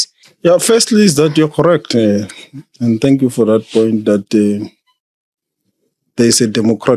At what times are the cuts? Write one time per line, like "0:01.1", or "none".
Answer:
none